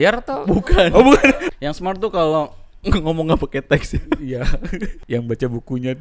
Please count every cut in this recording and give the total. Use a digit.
2